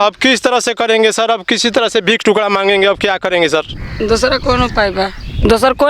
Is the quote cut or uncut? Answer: uncut